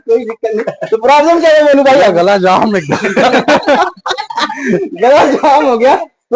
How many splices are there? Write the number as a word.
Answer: zero